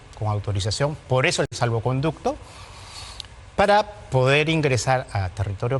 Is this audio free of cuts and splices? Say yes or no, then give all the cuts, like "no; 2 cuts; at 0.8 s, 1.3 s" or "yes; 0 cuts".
yes; 0 cuts